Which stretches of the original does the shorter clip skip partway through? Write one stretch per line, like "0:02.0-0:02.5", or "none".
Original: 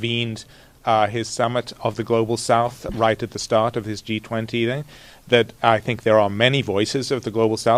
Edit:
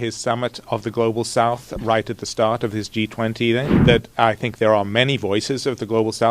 0:04.9-0:05.2